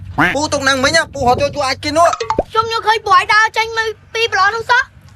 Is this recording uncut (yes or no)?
yes